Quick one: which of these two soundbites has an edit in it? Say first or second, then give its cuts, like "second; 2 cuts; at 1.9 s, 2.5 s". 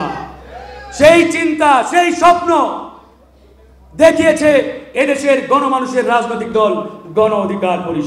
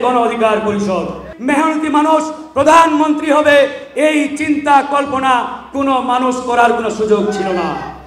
second; 1 cut; at 1.3 s